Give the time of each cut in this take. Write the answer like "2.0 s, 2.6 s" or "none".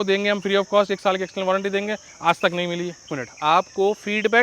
3.1 s